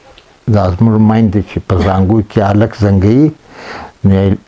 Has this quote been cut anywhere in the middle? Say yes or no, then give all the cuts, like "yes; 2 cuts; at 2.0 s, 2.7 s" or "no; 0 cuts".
no; 0 cuts